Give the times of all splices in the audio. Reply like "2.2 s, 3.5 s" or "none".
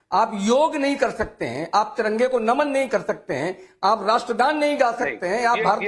none